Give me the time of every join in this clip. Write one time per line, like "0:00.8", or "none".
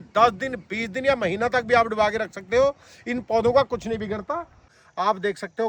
0:04.7